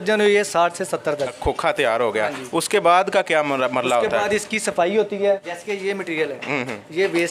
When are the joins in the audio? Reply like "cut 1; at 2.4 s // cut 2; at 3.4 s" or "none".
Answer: cut 1; at 1.4 s // cut 2; at 5.5 s